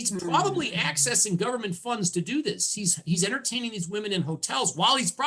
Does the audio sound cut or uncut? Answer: uncut